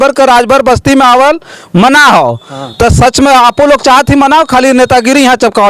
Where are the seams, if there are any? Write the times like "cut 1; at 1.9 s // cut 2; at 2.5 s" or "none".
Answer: none